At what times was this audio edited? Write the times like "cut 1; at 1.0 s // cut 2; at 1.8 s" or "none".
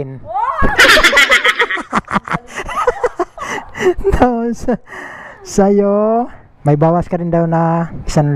none